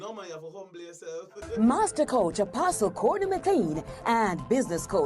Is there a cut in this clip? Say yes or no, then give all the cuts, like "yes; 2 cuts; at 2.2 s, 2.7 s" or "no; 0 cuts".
yes; 1 cut; at 1.3 s